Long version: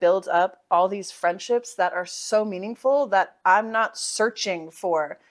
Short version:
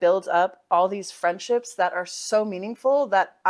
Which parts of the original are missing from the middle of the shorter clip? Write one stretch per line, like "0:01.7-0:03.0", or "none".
none